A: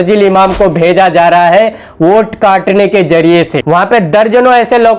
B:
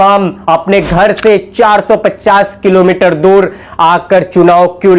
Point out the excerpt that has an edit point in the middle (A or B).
A